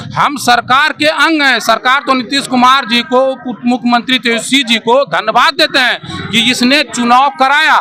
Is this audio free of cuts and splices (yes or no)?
yes